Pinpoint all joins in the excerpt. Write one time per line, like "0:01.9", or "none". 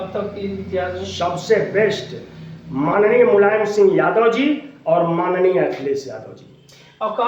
none